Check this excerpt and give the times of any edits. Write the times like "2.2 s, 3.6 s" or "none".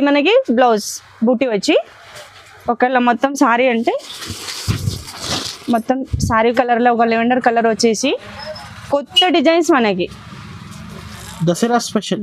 6.5 s